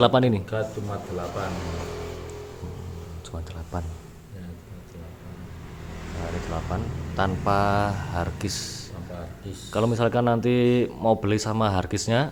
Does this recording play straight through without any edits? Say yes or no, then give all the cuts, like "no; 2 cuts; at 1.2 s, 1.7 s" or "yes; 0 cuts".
yes; 0 cuts